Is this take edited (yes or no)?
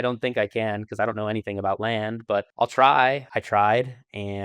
yes